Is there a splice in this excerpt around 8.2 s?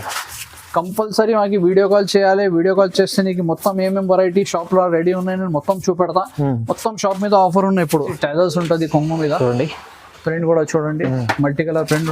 yes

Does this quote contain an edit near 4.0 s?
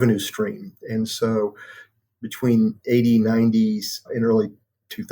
yes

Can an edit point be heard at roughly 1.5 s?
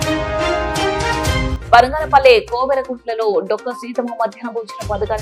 yes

